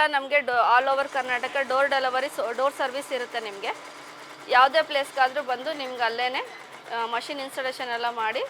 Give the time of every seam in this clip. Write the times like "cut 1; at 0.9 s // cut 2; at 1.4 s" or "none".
none